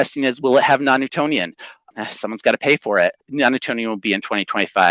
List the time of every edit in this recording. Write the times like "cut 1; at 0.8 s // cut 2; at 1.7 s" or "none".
cut 1; at 1.8 s // cut 2; at 3.2 s